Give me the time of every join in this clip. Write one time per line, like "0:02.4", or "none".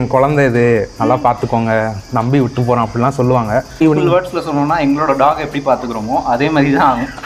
0:03.8